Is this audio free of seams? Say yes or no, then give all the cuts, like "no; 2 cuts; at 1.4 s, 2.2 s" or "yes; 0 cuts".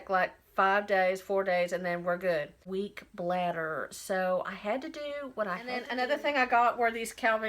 no; 2 cuts; at 2.6 s, 5.9 s